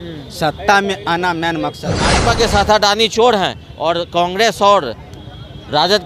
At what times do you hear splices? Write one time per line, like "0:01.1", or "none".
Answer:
0:02.2